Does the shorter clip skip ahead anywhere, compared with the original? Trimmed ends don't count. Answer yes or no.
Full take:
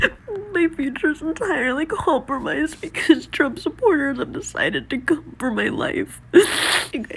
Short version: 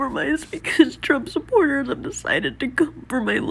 no